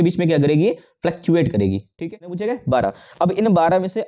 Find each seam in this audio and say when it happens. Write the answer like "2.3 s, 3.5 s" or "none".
1.9 s